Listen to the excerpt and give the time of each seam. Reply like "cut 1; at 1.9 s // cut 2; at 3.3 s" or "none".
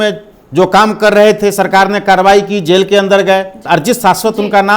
cut 1; at 3.6 s

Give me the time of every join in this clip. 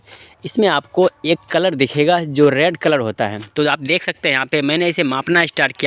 cut 1; at 3.4 s

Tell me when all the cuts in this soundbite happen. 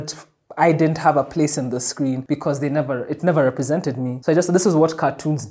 cut 1; at 2.2 s // cut 2; at 4.1 s

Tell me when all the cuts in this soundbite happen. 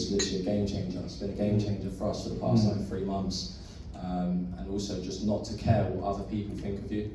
none

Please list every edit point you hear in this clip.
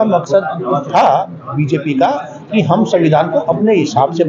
none

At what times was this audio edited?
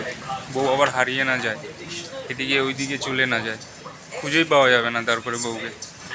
none

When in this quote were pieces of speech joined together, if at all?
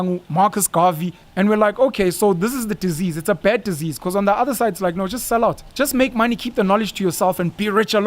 cut 1; at 1.2 s // cut 2; at 5.6 s

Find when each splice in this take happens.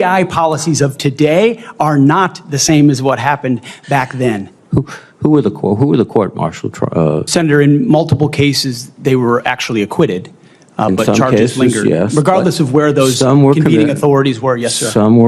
cut 1; at 4.5 s

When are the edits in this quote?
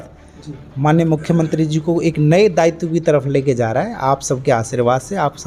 none

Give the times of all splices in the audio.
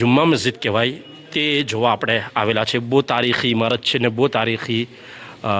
none

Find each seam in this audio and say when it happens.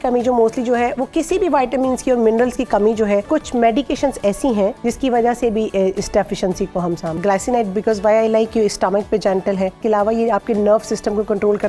cut 1; at 3.3 s // cut 2; at 4.8 s // cut 3; at 7.2 s // cut 4; at 9.8 s

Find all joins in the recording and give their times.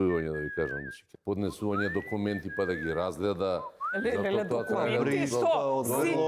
cut 1; at 1.0 s

